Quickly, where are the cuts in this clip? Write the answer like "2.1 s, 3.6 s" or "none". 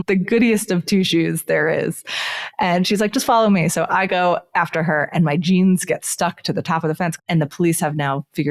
7.2 s